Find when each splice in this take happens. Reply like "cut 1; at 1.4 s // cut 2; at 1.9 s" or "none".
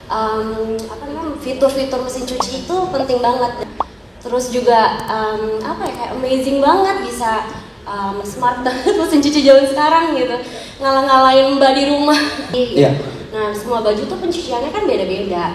cut 1; at 3.6 s // cut 2; at 12.5 s